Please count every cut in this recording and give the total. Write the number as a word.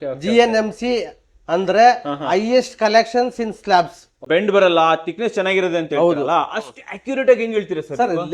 one